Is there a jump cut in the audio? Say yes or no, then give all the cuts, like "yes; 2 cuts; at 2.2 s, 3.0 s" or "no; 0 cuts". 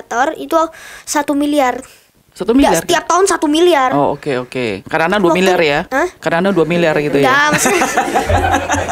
no; 0 cuts